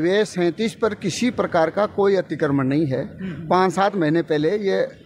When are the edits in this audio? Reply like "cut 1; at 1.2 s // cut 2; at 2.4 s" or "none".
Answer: none